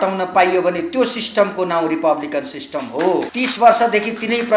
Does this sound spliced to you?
yes; 1 cut; at 3.3 s

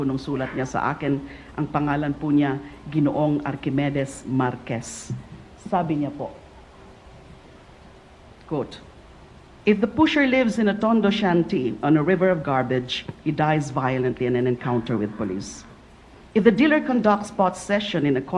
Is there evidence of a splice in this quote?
yes; 1 cut; at 6.4 s

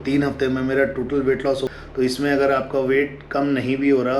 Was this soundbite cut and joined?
yes; 1 cut; at 1.6 s

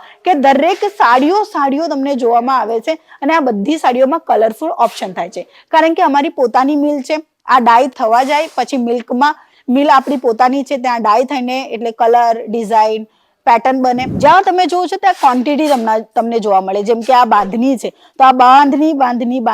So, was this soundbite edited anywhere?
yes; 1 cut; at 14.1 s

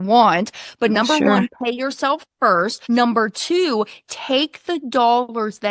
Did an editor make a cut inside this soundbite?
yes; 1 cut; at 2.8 s

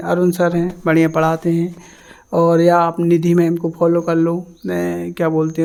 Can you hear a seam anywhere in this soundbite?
no; 0 cuts

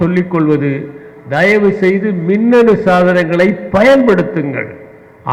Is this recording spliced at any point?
no; 0 cuts

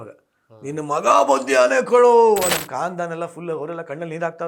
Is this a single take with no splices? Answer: no; 1 cut; at 2.5 s

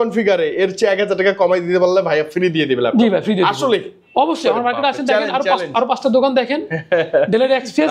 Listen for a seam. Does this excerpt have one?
no; 0 cuts

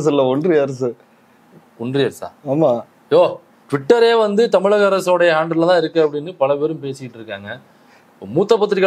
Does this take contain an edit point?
no; 0 cuts

